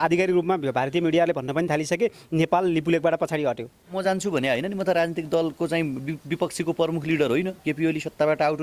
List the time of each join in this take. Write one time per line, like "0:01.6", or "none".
0:03.9